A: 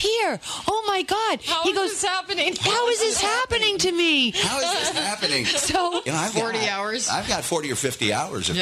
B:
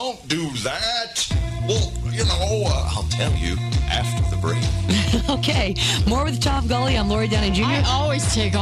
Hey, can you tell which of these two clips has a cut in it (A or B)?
A